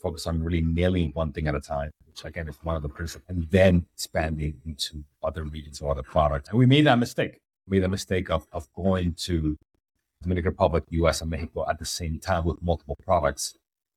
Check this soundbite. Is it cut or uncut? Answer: cut